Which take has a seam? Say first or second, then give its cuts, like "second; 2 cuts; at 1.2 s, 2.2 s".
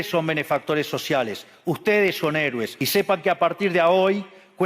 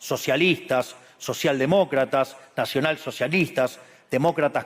first; 1 cut; at 2.8 s